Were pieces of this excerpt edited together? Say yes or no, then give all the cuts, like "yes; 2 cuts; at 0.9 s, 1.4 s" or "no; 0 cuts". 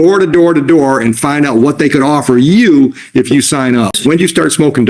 yes; 1 cut; at 4.0 s